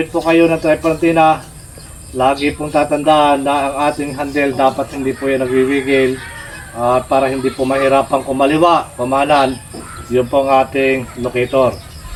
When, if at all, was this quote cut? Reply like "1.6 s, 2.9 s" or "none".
none